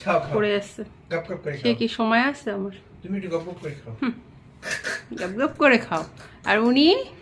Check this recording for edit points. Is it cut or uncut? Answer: uncut